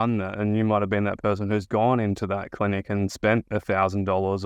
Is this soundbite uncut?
yes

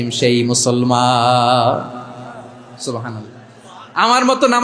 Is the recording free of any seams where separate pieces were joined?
yes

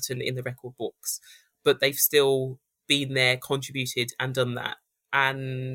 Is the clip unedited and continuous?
yes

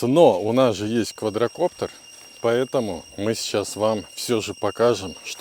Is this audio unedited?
yes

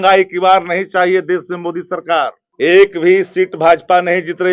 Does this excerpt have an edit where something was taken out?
yes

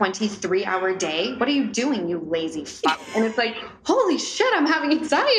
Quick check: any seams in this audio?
no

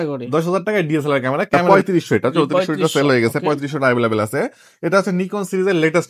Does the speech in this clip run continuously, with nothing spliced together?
no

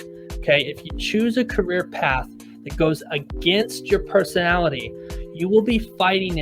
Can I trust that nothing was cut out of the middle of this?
yes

